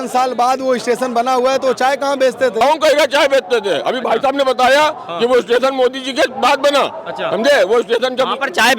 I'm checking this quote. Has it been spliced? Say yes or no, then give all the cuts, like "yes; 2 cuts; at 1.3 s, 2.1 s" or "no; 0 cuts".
yes; 1 cut; at 2.6 s